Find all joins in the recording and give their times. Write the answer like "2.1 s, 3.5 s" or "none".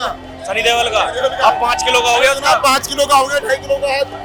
none